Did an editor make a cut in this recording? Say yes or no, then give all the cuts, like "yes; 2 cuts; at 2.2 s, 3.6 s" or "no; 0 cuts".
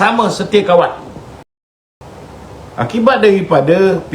yes; 1 cut; at 1.5 s